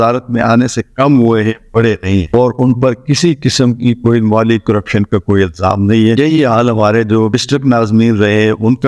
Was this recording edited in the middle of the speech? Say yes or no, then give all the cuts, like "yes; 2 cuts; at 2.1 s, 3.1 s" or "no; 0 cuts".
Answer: no; 0 cuts